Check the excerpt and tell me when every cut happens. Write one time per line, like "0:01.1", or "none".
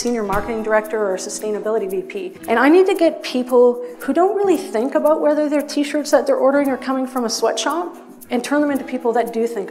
0:02.3